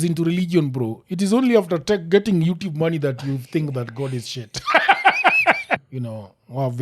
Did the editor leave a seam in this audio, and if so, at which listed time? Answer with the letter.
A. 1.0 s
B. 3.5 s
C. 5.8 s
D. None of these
C